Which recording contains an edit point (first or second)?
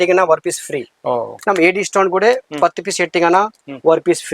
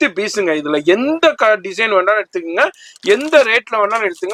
first